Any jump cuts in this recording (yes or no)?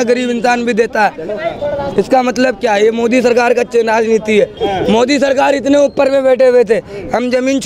yes